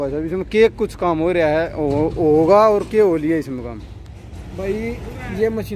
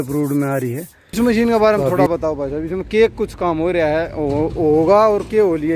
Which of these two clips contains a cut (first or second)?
second